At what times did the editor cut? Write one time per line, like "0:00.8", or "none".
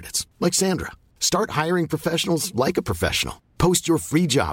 none